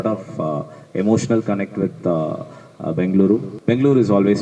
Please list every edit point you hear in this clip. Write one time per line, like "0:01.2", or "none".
0:03.5